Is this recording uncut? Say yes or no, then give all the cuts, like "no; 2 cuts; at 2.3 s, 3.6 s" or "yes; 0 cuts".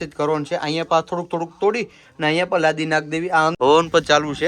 no; 1 cut; at 3.5 s